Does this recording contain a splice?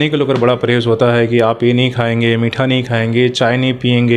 no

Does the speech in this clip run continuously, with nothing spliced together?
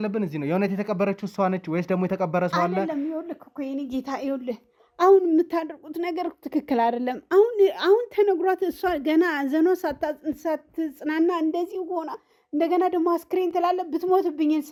yes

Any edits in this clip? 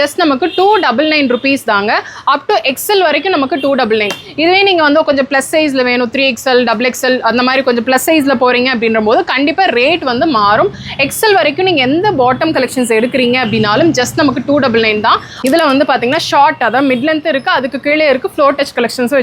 yes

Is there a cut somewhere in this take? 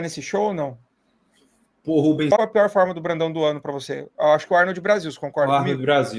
yes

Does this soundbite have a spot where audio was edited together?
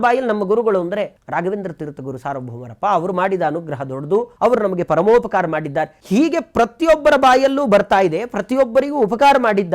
yes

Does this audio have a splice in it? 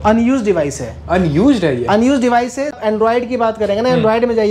yes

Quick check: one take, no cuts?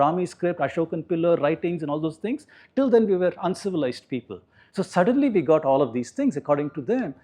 yes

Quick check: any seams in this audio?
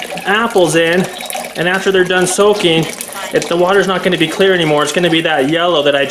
no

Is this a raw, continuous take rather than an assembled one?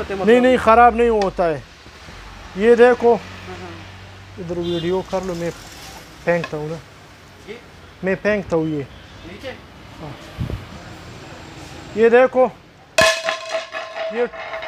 yes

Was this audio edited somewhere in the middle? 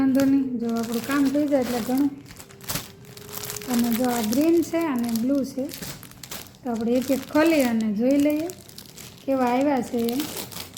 no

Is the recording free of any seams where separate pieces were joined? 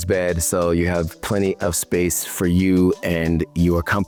yes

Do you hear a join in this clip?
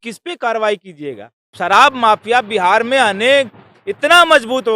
yes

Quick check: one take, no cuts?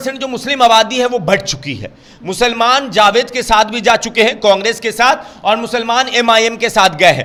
yes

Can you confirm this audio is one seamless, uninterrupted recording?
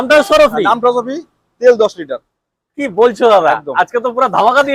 yes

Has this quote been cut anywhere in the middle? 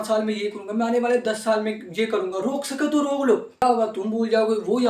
yes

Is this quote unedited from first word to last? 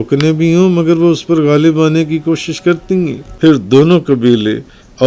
no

